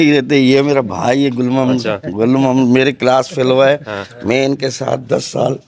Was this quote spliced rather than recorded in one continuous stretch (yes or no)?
no